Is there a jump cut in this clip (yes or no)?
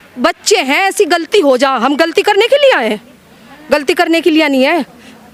no